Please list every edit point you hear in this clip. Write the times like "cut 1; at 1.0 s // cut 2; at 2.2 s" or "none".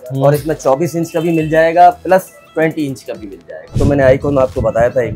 cut 1; at 3.8 s